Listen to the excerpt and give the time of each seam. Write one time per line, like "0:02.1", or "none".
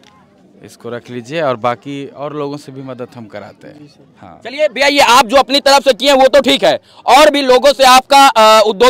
none